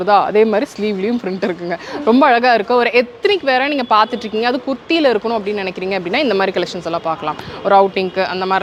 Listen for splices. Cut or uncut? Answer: uncut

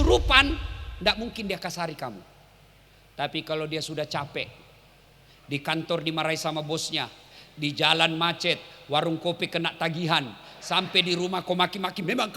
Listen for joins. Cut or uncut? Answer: uncut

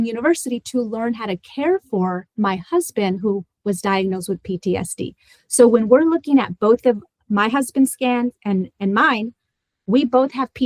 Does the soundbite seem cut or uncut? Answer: cut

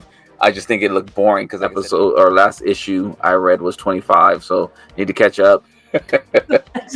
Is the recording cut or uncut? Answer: cut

